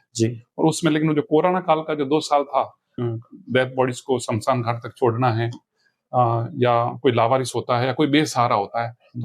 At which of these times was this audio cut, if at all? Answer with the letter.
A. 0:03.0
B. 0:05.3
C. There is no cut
A